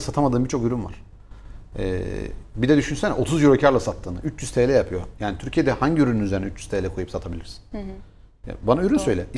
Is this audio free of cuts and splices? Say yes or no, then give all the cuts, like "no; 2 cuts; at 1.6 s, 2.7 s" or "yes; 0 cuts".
yes; 0 cuts